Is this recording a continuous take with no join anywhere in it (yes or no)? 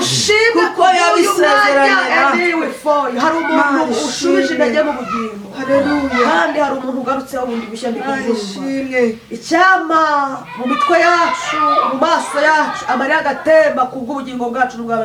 yes